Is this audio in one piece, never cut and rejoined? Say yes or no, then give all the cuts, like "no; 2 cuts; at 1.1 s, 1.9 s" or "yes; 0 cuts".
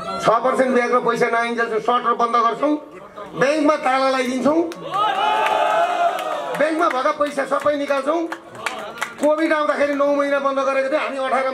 yes; 0 cuts